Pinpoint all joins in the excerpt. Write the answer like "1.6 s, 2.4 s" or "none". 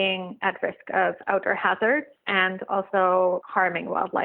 2.2 s, 3.5 s